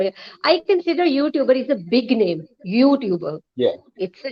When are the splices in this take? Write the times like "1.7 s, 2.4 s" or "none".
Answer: none